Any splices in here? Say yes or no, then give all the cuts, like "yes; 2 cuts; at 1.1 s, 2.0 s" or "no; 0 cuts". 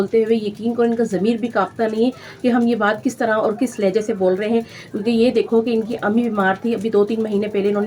no; 0 cuts